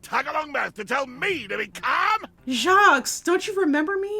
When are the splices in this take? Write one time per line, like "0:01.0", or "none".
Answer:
0:02.3

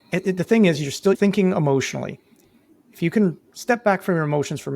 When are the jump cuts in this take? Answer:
0:01.2

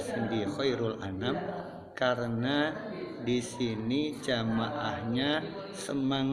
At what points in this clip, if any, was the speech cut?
none

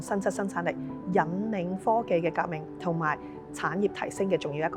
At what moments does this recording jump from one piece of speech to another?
none

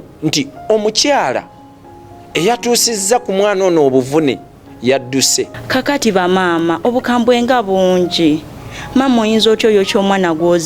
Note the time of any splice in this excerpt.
0:05.6

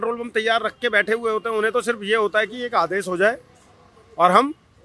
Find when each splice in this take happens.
none

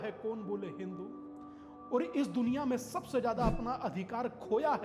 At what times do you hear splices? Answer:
none

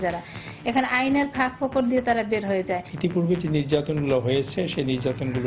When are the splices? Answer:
0:02.9

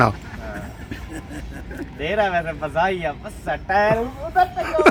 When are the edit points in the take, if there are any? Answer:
none

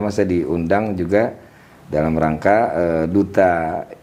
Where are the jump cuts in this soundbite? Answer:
none

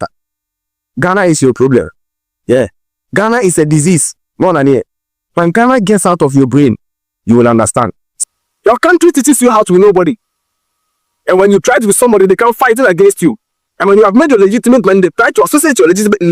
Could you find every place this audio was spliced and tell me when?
0:08.0

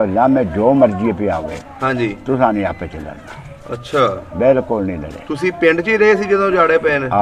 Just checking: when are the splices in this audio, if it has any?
none

